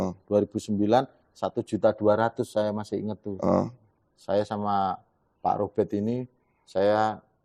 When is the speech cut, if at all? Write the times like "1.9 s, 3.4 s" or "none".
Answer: none